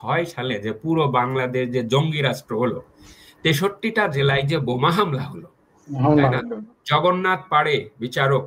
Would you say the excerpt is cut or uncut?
uncut